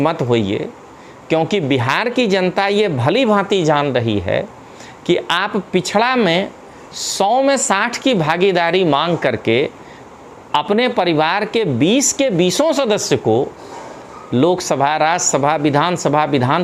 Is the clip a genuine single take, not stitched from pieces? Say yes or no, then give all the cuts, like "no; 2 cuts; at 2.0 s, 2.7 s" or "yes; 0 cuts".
yes; 0 cuts